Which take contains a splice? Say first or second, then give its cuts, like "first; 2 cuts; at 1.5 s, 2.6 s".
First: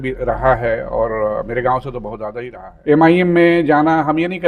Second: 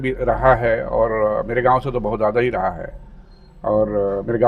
first; 1 cut; at 2.4 s